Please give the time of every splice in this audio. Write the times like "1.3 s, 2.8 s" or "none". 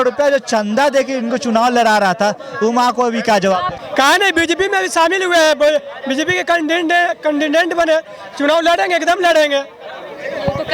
3.8 s